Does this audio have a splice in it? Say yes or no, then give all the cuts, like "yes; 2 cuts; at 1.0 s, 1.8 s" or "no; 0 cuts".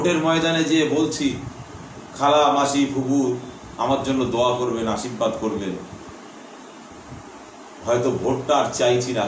no; 0 cuts